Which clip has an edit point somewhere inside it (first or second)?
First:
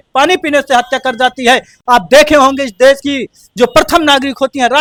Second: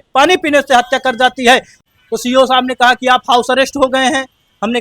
second